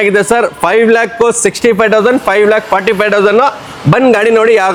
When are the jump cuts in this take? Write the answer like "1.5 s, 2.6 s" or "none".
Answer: none